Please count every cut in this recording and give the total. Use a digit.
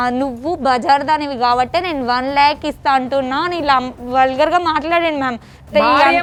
0